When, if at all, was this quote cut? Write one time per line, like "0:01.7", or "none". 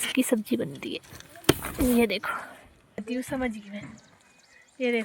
0:03.2